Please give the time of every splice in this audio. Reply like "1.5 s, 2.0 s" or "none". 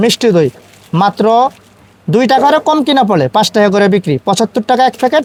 none